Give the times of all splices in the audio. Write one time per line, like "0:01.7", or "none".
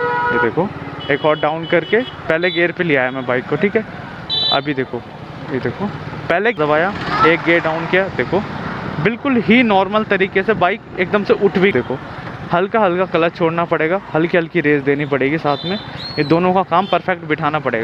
0:06.6
0:11.7